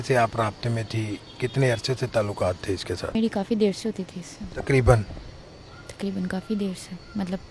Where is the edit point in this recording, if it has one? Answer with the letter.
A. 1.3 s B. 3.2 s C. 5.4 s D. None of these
B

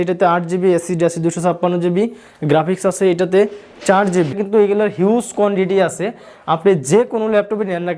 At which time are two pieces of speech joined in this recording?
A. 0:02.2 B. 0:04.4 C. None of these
B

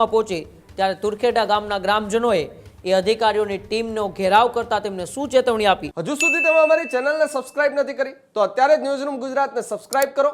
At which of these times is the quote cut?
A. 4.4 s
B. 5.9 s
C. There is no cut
B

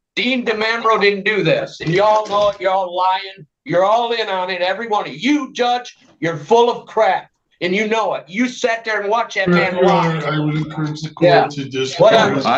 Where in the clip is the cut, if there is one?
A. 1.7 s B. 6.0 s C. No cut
C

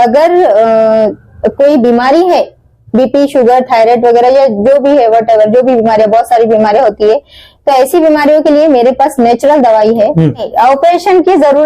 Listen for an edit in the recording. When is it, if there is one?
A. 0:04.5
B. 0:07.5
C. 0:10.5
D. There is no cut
C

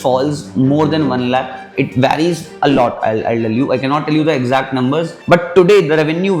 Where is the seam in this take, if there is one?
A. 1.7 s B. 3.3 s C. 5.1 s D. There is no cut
C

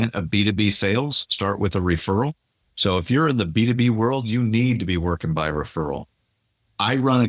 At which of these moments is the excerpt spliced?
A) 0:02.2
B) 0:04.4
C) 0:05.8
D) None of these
D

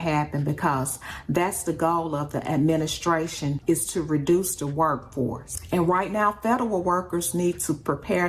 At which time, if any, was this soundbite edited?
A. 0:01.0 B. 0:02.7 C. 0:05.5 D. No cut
C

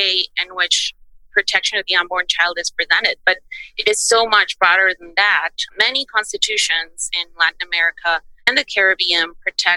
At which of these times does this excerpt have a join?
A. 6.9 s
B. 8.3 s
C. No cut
B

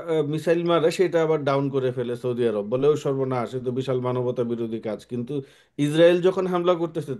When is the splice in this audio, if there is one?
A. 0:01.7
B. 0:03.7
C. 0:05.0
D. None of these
D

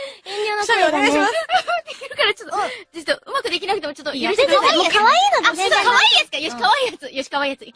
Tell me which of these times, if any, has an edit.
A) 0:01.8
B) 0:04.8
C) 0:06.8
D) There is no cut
A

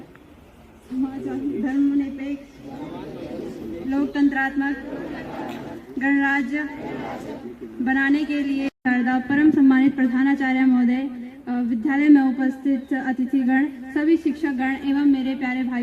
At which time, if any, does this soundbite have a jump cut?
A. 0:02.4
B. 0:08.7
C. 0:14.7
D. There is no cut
B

